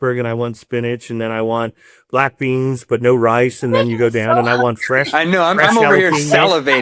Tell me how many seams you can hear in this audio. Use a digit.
0